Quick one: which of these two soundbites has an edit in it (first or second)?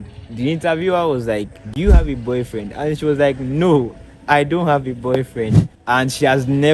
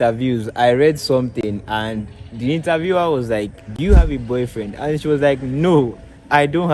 first